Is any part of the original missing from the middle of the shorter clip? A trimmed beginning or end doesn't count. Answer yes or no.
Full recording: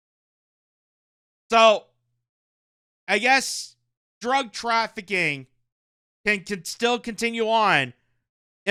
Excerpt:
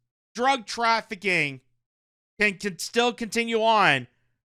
no